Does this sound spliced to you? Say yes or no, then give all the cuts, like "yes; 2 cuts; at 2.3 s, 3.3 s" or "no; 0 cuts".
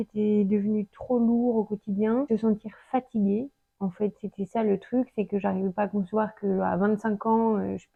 no; 0 cuts